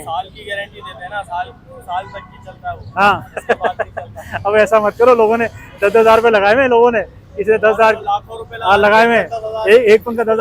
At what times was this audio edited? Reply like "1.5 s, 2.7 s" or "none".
none